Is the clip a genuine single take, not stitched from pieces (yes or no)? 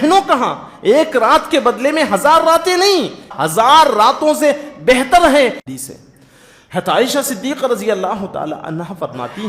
no